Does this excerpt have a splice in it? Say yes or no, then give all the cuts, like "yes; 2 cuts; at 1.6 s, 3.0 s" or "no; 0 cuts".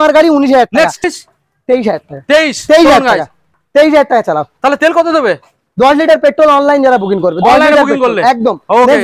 yes; 1 cut; at 1.1 s